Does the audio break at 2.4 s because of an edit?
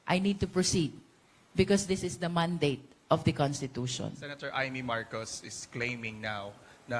no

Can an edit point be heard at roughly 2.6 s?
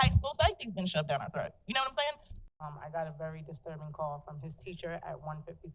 yes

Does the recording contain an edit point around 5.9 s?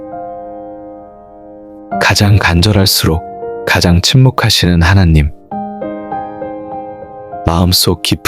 yes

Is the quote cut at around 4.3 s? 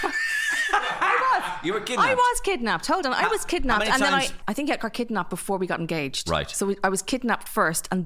yes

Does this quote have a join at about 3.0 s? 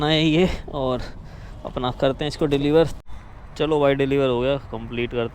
yes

